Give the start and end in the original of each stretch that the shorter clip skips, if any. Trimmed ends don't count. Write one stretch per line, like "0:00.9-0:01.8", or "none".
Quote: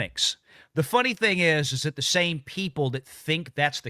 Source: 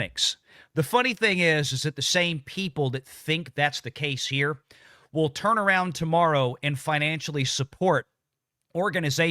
none